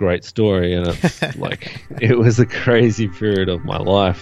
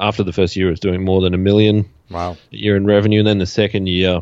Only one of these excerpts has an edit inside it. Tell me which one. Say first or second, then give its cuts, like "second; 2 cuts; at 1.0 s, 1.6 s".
second; 1 cut; at 2.5 s